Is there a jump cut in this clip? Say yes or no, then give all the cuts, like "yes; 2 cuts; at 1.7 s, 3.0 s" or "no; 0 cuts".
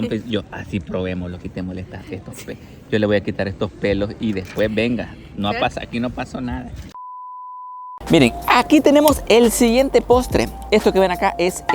no; 0 cuts